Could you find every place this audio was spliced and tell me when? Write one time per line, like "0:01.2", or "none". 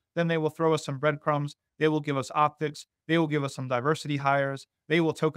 none